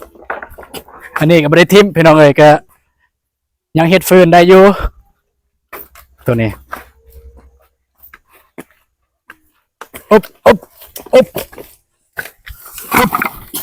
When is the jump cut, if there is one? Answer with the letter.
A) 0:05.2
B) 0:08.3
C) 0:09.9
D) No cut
D